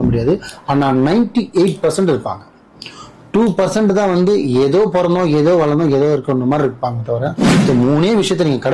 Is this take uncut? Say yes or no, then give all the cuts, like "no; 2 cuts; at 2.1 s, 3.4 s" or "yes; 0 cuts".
no; 1 cut; at 7.5 s